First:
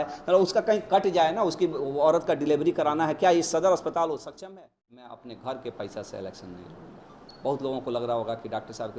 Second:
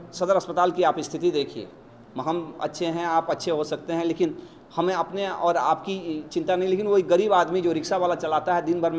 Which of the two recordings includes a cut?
first; 1 cut; at 4.3 s

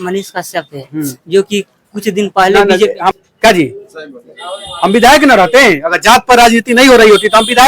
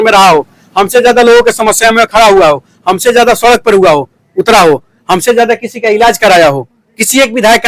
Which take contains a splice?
first; 1 cut; at 3.1 s

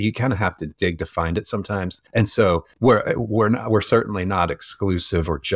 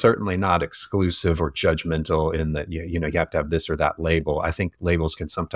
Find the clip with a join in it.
first; 2 cuts; at 2.0 s, 2.7 s

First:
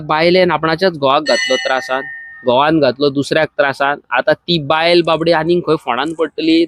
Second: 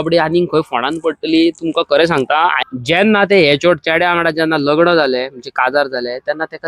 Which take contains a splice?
second; 1 cut; at 2.6 s

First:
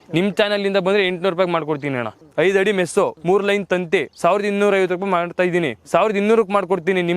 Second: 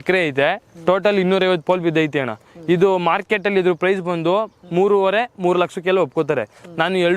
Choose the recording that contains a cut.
first; 4 cuts; at 2.2 s, 3.2 s, 4.1 s, 5.8 s

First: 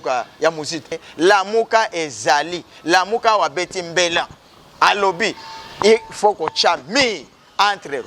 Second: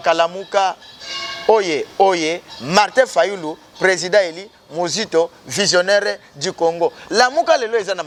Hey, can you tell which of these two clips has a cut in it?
first; 1 cut; at 0.9 s

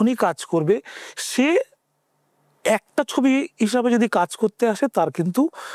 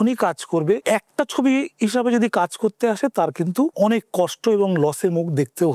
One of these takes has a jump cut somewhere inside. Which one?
second; 2 cuts; at 0.8 s, 3.7 s

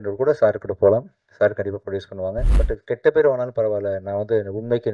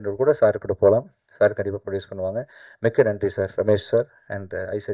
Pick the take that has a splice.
first; 1 cut; at 2.5 s

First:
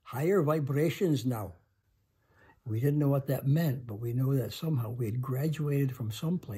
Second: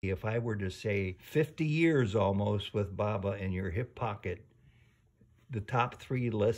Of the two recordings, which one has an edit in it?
second; 1 cut; at 1.2 s

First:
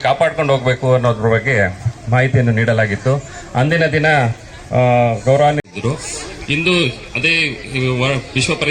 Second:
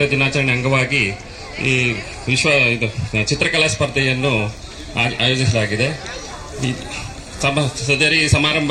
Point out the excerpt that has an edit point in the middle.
first; 1 cut; at 5.6 s

